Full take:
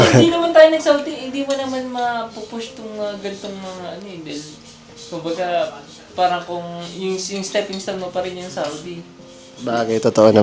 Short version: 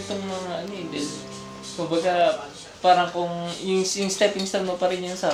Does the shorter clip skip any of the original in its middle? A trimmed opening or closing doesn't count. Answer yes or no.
no